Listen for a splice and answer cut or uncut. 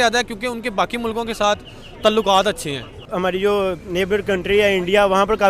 cut